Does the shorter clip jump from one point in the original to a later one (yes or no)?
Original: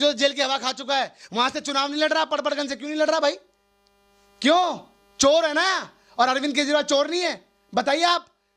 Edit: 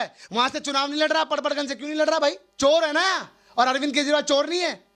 yes